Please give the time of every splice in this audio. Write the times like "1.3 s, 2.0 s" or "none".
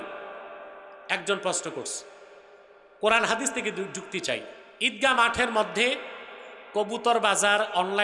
4.6 s